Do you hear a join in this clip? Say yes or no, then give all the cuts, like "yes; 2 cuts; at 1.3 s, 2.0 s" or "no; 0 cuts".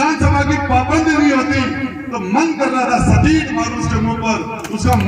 no; 0 cuts